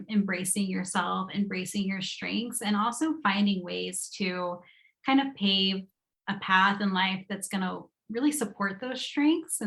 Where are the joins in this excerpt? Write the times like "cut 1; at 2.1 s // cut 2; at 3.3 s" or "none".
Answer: none